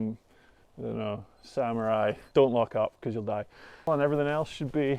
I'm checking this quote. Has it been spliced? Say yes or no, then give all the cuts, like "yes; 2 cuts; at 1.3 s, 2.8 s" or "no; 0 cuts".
yes; 2 cuts; at 2.2 s, 3.9 s